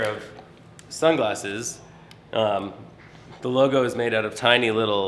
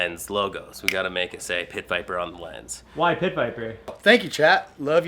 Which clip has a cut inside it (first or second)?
second